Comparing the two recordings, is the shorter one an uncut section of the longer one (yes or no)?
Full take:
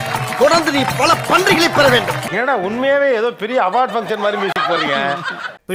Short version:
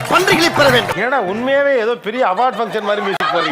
no